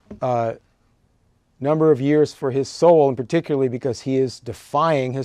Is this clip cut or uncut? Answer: uncut